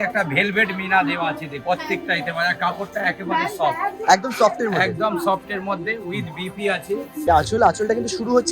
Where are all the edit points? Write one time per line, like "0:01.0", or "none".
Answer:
0:01.5
0:07.2

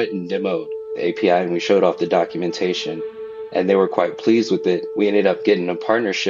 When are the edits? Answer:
none

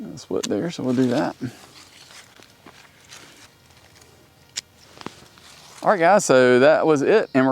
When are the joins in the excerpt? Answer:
0:03.4

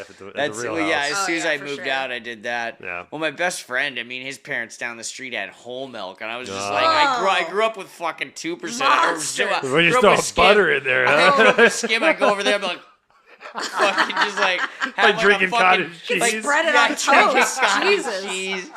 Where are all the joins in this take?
none

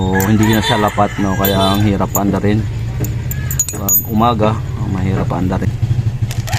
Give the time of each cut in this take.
0:05.7

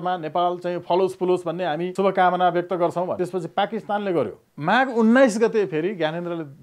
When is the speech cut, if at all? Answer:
0:01.9
0:03.1
0:04.5

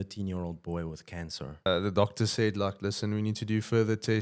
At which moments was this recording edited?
0:01.7

